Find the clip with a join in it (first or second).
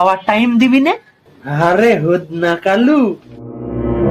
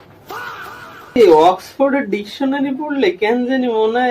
second